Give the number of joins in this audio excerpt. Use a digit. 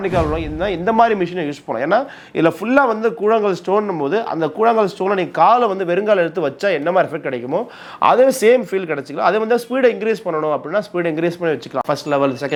0